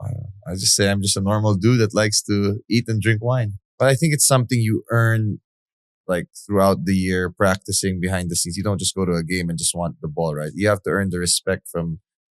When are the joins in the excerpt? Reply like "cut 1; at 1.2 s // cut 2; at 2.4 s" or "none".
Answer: cut 1; at 3.6 s

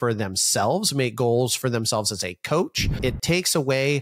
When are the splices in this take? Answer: cut 1; at 3.0 s

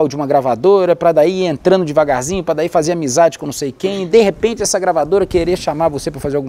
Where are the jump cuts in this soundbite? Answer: cut 1; at 4.0 s

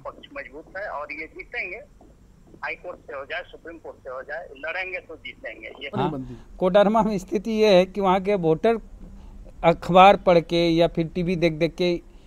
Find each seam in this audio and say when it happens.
cut 1; at 5.9 s

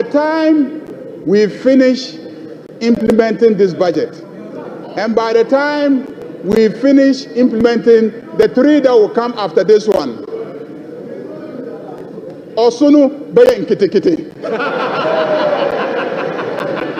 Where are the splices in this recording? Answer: none

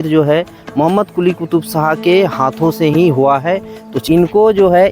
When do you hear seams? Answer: cut 1; at 4.0 s

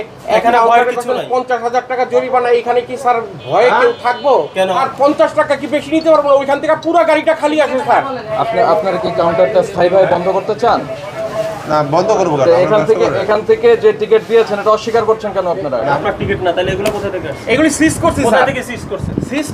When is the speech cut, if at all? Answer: cut 1; at 4.8 s // cut 2; at 8.2 s // cut 3; at 16.0 s

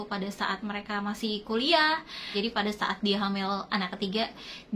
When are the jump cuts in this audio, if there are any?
cut 1; at 2.2 s

